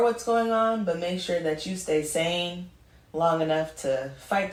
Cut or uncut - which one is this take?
uncut